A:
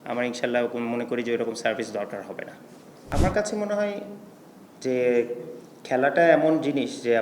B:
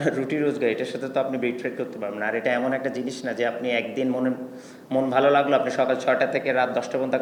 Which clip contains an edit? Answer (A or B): A